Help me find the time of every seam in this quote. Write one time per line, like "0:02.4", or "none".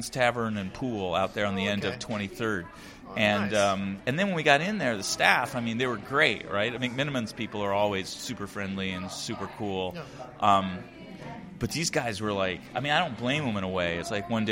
0:04.0